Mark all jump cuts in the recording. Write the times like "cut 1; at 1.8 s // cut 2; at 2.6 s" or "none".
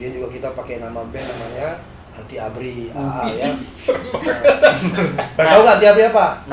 none